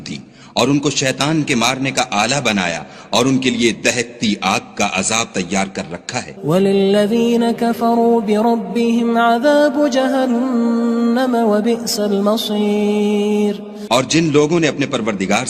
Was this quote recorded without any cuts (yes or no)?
no